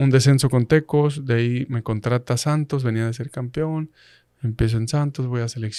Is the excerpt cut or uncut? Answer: uncut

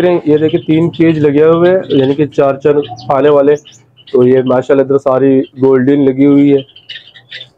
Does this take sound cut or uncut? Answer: uncut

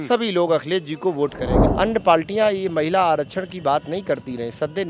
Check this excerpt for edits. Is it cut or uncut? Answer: cut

